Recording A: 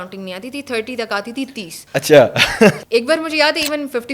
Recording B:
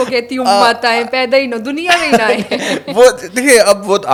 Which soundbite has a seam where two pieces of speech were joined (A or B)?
A